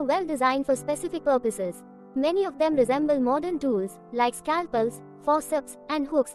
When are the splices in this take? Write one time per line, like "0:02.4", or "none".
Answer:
none

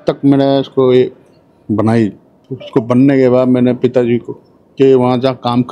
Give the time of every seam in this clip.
none

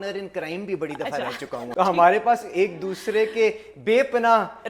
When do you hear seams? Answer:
0:01.7

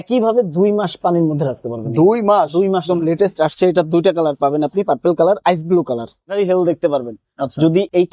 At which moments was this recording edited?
0:02.8
0:06.3

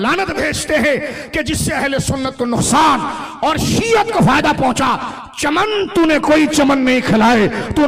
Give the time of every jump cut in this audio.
none

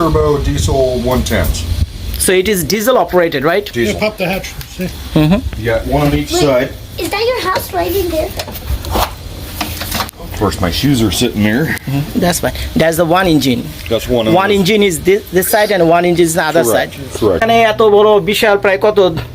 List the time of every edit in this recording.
0:17.4

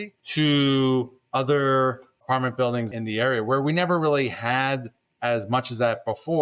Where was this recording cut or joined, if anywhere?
0:02.9

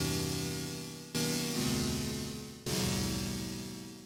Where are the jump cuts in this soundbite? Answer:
none

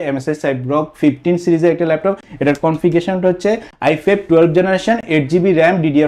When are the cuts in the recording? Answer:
none

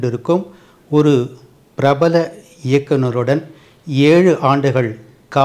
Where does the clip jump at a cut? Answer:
none

